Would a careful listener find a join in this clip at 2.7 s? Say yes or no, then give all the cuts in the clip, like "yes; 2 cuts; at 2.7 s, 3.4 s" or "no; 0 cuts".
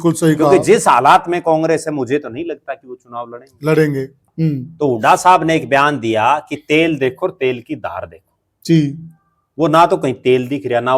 no; 1 cut; at 4.2 s